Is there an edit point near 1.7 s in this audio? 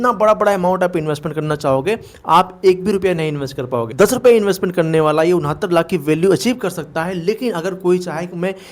no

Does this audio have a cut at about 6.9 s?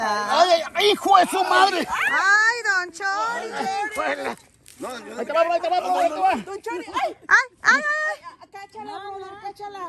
no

